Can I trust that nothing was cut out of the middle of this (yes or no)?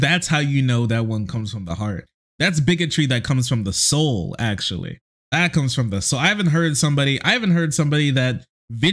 no